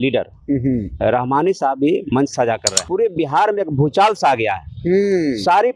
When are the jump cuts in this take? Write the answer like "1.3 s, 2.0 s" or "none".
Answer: 2.7 s